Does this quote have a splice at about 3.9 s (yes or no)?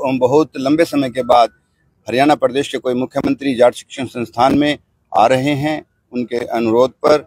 no